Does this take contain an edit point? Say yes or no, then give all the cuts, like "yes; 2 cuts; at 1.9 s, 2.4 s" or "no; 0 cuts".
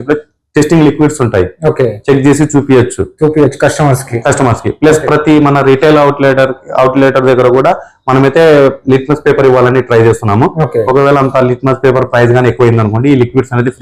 no; 0 cuts